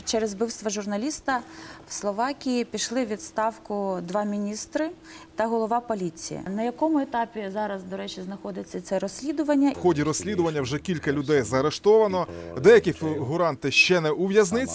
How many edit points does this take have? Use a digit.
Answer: 2